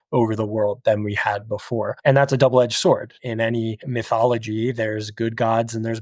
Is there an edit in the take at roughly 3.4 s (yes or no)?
yes